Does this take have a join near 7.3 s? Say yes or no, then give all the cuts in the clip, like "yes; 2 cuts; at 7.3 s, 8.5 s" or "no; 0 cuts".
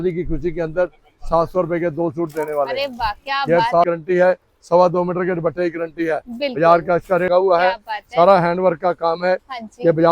yes; 2 cuts; at 3.9 s, 7.3 s